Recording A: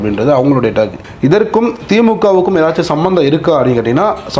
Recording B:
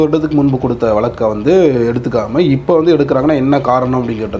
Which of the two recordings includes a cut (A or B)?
A